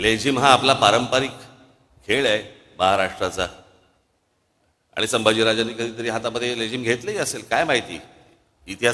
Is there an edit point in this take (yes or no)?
no